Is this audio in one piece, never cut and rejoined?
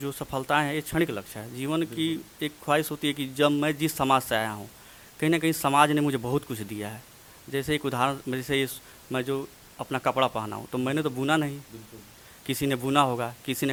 yes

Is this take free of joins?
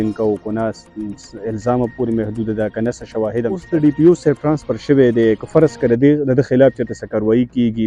no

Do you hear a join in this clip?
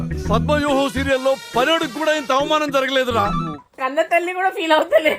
yes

